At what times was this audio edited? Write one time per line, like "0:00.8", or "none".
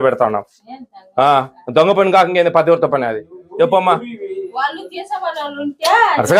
none